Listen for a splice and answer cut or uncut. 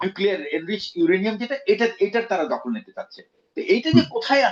uncut